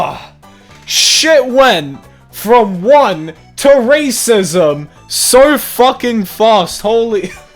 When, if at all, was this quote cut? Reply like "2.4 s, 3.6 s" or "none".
none